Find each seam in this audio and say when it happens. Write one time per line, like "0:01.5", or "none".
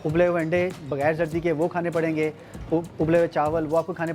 none